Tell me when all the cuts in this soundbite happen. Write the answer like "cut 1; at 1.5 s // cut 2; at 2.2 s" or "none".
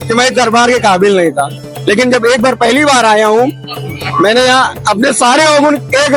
none